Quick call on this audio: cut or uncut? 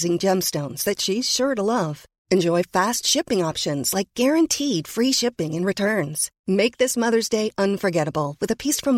uncut